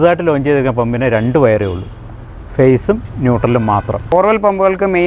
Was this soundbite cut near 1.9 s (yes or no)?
no